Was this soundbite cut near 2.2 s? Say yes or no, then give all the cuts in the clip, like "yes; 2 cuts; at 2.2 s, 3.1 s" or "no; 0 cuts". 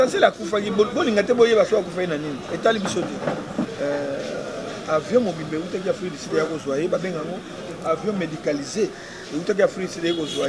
no; 1 cut; at 3.7 s